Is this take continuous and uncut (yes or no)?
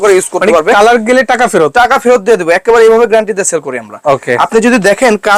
yes